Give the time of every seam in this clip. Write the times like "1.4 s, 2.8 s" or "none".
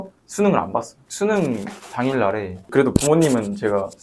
1.0 s

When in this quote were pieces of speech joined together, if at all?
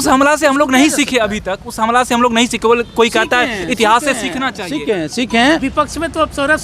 5.6 s

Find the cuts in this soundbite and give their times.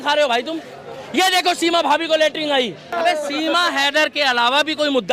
2.9 s

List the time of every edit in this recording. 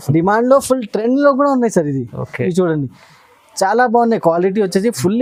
none

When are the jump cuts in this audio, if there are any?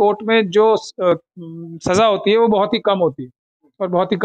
none

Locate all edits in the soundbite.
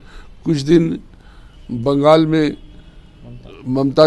none

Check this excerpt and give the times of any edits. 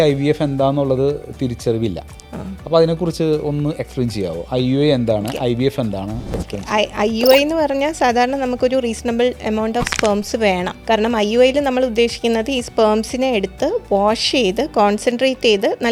none

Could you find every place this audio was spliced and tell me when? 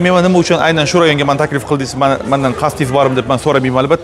none

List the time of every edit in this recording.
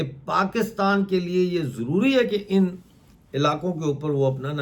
none

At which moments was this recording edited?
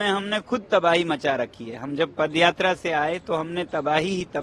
none

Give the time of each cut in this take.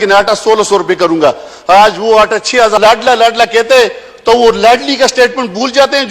2.8 s

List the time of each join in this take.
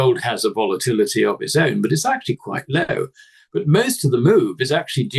none

